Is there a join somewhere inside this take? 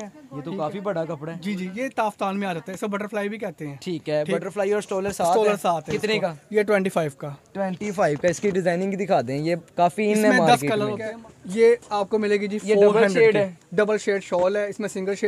yes; 1 cut; at 11.0 s

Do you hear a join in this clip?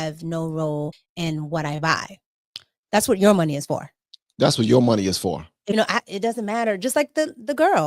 yes; 2 cuts; at 1.0 s, 5.6 s

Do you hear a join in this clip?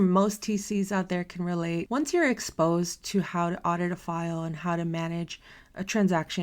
yes; 1 cut; at 1.9 s

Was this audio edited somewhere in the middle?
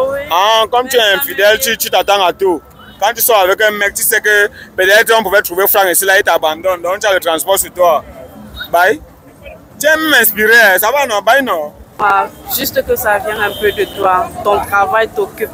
yes; 1 cut; at 11.9 s

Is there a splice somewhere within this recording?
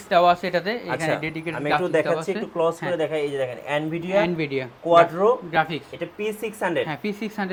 no; 0 cuts

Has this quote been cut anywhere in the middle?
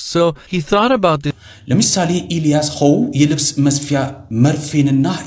yes; 1 cut; at 4.2 s

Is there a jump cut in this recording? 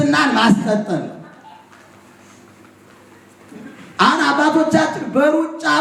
no; 0 cuts

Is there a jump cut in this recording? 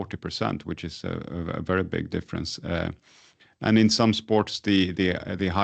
no; 0 cuts

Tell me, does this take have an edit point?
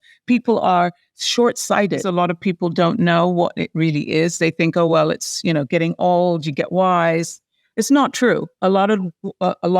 yes; 1 cut; at 2.1 s

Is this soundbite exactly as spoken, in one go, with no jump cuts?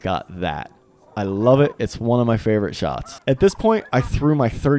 no; 1 cut; at 3.1 s

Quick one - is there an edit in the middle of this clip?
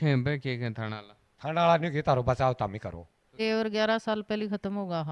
yes; 1 cut; at 3.4 s

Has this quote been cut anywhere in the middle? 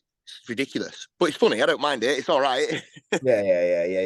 no; 0 cuts

